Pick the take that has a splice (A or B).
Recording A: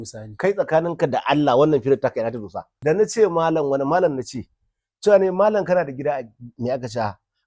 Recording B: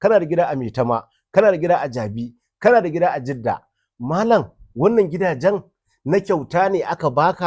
A